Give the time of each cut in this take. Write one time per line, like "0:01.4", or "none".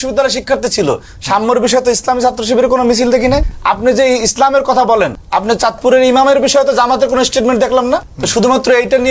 0:03.5
0:05.2
0:08.2